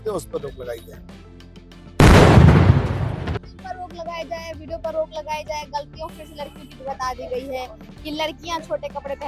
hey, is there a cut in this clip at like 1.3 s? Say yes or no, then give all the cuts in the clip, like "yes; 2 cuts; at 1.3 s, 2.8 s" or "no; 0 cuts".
no; 0 cuts